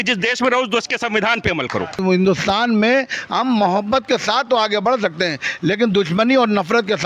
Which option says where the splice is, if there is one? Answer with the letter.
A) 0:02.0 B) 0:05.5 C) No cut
A